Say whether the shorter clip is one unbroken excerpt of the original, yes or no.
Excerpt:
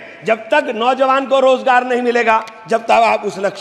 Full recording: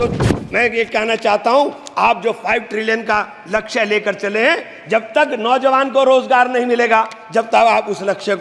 yes